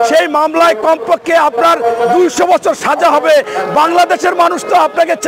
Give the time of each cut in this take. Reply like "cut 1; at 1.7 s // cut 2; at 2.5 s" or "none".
cut 1; at 3.5 s